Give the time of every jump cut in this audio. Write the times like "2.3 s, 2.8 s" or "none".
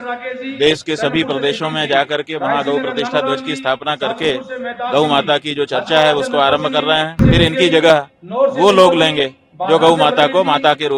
7.2 s